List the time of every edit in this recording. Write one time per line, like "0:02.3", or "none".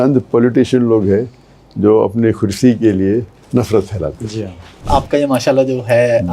0:04.9